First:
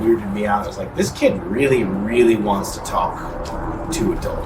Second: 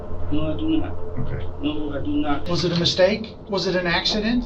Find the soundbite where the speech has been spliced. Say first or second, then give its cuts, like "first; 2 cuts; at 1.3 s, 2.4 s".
second; 2 cuts; at 2.4 s, 3.3 s